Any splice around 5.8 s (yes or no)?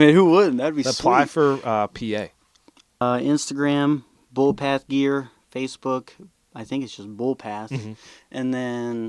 no